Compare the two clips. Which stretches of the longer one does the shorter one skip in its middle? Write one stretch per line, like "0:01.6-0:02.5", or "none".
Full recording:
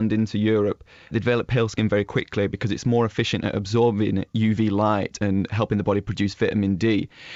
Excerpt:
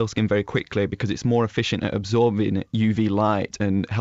none